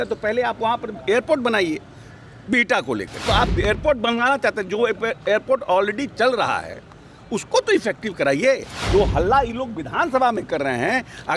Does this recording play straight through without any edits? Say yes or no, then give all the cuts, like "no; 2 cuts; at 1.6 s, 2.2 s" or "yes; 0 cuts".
no; 2 cuts; at 3.2 s, 8.7 s